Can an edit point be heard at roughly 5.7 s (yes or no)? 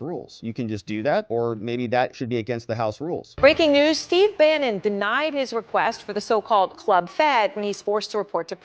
no